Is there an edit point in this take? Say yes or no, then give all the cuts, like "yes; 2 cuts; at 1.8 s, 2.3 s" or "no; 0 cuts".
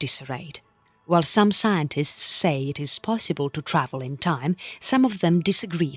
no; 0 cuts